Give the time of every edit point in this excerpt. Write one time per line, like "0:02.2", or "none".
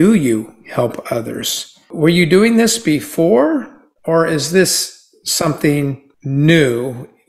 0:01.9
0:06.1